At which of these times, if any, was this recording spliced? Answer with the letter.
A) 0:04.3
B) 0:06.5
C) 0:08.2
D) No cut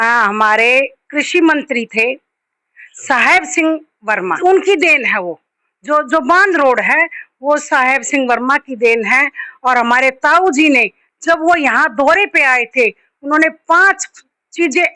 A